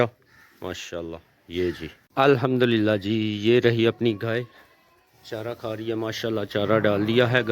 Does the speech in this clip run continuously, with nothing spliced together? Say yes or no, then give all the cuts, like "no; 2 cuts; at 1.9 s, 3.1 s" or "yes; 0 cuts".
no; 1 cut; at 1.9 s